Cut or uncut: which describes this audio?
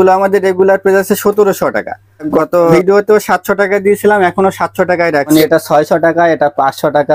cut